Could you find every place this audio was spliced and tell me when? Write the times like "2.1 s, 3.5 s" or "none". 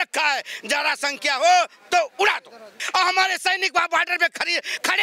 2.8 s